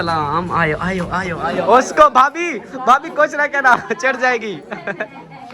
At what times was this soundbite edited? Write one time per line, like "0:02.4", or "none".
0:01.4